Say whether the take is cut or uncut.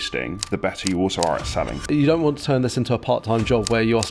cut